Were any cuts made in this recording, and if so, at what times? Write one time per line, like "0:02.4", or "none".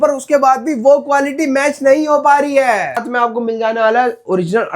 0:03.0